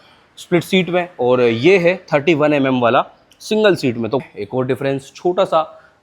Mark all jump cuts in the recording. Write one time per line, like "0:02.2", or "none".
0:04.2